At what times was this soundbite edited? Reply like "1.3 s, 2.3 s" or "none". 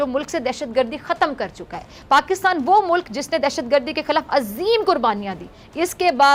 none